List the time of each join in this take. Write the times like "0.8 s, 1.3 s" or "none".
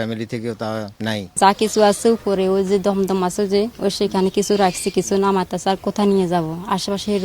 1.3 s